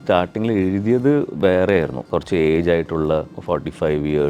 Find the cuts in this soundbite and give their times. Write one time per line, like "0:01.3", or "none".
0:02.0
0:03.3